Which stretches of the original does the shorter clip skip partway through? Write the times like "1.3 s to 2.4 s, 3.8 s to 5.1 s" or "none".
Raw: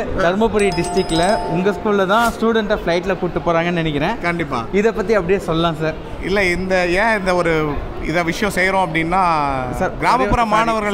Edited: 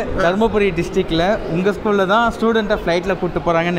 none